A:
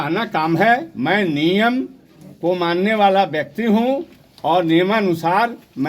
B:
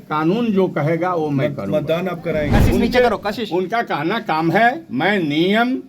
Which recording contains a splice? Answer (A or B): B